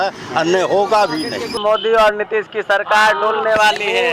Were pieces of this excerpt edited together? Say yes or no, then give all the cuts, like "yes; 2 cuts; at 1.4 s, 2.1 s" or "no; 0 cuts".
yes; 1 cut; at 1.6 s